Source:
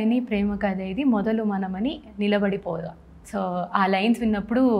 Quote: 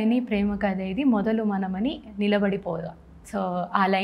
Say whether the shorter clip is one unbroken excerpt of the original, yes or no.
yes